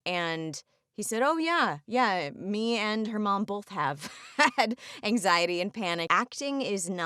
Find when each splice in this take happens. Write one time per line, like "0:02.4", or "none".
0:06.1